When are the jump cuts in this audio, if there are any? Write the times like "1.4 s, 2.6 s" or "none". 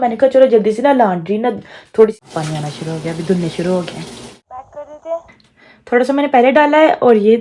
2.2 s, 4.4 s